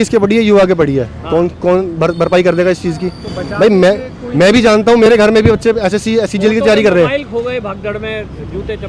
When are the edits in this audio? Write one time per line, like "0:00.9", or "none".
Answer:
none